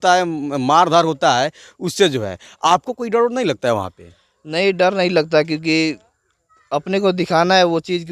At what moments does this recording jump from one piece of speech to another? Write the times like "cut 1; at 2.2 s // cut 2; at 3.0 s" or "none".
none